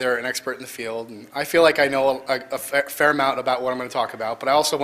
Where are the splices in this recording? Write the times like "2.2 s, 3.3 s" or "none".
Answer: 3.2 s